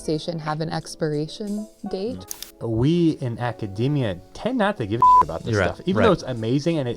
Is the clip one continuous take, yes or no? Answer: no